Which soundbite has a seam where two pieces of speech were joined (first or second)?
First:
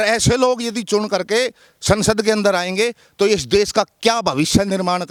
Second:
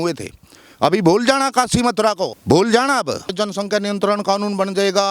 second